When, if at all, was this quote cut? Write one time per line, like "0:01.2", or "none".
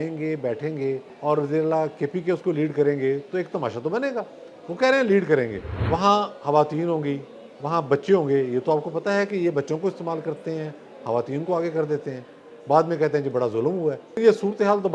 0:01.1
0:05.7
0:14.2